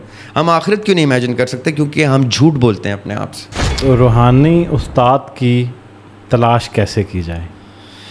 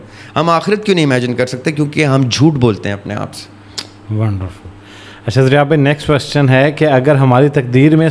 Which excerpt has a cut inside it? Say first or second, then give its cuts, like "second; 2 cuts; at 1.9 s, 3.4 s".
first; 1 cut; at 3.7 s